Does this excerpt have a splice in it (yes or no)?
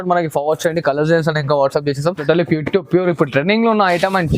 yes